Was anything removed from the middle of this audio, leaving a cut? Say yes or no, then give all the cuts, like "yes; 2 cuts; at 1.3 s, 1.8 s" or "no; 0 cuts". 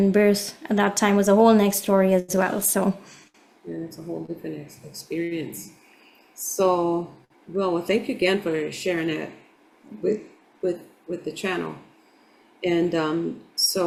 no; 0 cuts